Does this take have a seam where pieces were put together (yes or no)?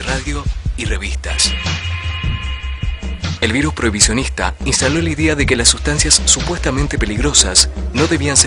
no